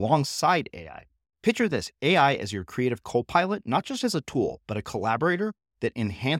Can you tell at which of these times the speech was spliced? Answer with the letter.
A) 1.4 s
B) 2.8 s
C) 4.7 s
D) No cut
D